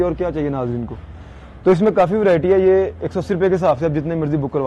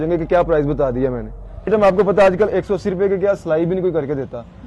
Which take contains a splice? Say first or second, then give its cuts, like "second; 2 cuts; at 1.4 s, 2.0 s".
second; 1 cut; at 1.7 s